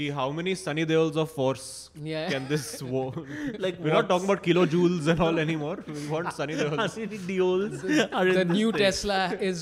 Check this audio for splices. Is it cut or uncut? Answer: uncut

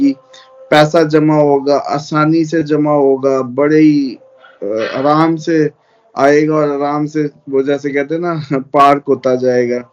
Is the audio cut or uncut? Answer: uncut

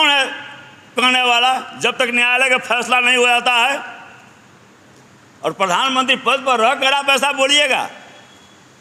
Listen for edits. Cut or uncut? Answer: uncut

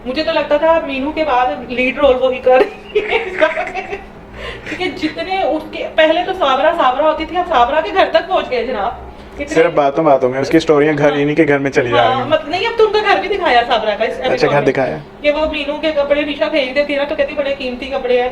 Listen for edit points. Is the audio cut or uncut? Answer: uncut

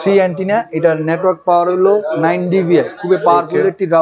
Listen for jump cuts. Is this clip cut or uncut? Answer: uncut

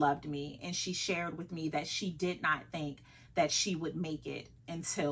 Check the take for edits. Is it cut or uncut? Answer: uncut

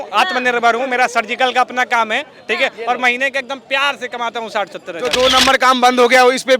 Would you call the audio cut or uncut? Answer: cut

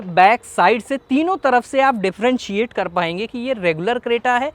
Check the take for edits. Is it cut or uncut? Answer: uncut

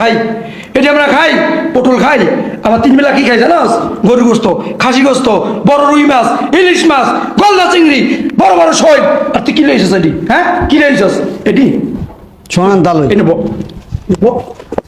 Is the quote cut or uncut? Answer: uncut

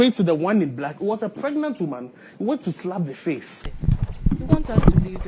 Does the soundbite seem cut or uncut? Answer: cut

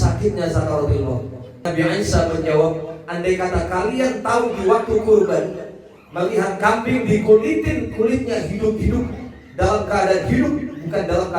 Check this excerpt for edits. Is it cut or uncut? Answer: cut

